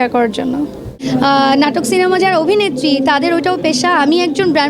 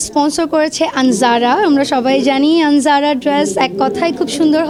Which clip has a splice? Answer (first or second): first